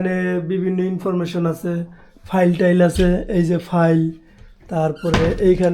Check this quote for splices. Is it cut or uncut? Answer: uncut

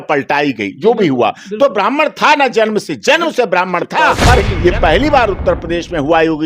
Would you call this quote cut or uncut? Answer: cut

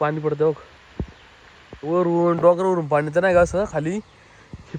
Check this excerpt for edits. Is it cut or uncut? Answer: uncut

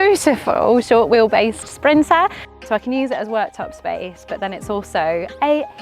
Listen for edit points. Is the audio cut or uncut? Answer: cut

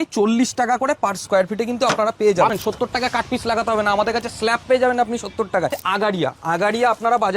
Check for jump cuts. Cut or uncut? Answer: cut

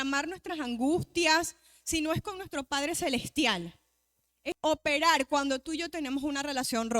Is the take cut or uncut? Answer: cut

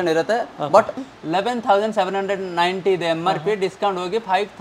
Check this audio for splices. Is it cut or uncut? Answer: cut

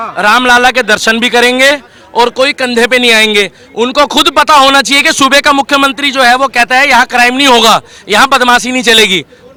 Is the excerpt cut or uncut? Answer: uncut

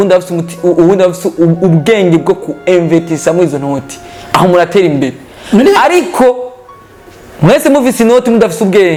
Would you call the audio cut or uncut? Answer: uncut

